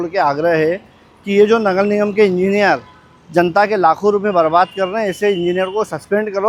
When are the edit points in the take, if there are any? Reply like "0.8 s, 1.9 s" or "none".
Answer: none